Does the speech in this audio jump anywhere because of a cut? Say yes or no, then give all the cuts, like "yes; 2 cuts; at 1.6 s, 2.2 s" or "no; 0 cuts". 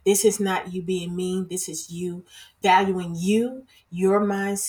no; 0 cuts